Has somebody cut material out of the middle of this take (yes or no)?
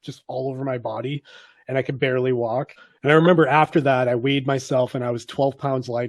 yes